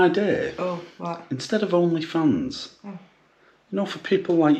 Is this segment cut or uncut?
uncut